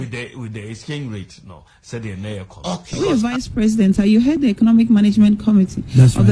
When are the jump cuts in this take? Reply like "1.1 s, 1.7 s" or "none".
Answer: 2.8 s